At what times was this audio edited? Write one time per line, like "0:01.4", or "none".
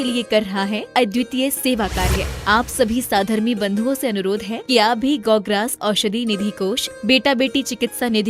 0:04.6